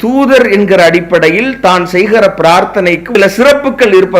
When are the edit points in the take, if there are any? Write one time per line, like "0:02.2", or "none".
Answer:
0:03.0